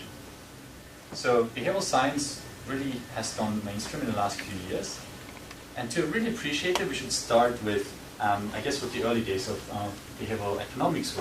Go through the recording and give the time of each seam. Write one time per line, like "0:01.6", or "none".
0:09.1